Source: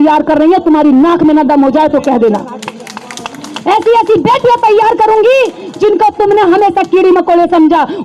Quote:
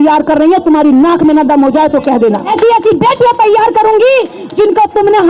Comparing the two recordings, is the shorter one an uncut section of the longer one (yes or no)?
no